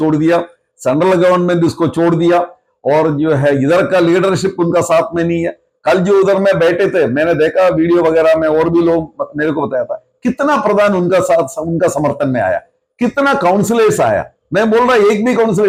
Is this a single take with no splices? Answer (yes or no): yes